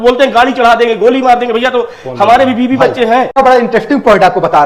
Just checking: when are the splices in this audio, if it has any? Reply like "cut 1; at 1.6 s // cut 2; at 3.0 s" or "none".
cut 1; at 3.3 s